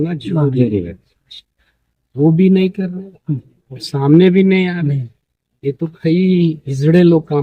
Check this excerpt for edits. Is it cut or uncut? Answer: uncut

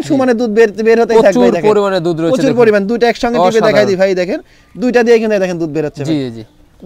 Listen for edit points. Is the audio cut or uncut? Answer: uncut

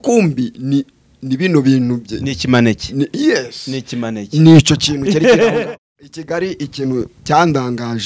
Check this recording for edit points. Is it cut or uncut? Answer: cut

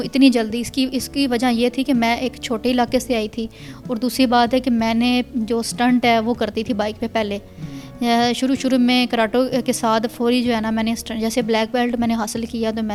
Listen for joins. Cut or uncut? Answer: uncut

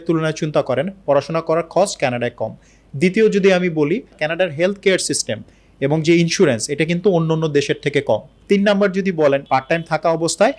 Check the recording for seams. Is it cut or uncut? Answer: cut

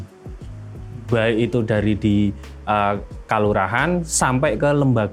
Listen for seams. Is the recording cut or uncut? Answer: uncut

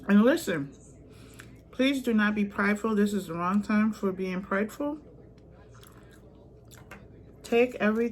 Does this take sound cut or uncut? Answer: uncut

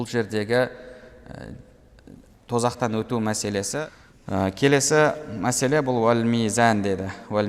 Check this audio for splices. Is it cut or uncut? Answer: cut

